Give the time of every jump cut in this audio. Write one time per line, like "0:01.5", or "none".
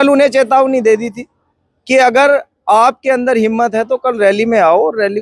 none